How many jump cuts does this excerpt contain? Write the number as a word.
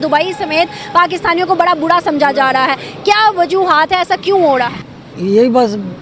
zero